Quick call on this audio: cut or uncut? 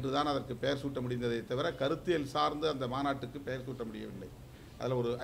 uncut